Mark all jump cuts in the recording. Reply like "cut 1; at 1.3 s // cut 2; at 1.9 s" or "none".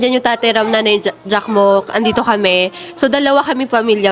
none